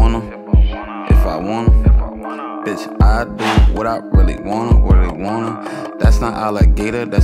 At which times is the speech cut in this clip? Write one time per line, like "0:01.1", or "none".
0:03.0